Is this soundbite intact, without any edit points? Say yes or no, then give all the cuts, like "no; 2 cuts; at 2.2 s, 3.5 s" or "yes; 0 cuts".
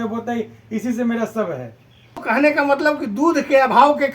no; 1 cut; at 2.1 s